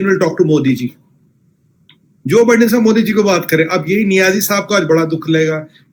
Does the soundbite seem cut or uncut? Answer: uncut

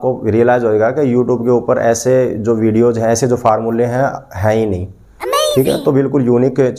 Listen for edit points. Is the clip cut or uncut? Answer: uncut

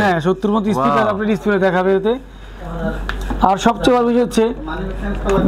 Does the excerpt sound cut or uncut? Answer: uncut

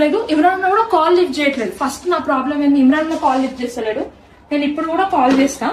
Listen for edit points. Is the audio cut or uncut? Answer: uncut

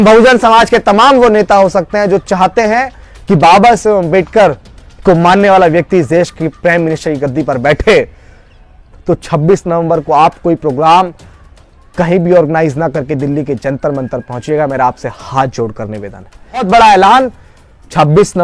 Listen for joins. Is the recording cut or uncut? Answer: cut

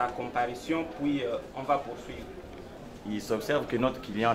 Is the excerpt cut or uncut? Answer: cut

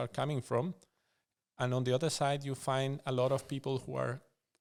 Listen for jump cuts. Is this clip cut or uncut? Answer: uncut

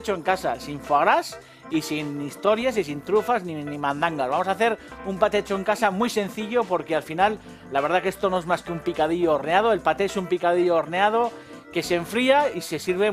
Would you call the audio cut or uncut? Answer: cut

